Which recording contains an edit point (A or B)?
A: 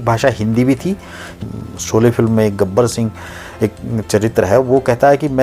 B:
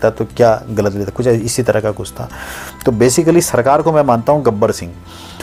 A